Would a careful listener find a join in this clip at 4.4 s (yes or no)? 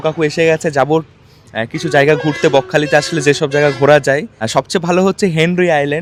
no